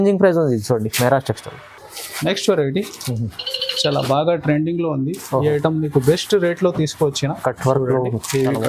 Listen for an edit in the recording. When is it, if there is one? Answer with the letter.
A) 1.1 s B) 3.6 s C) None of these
C